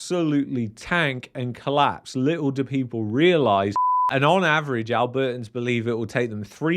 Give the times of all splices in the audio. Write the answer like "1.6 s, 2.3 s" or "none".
3.9 s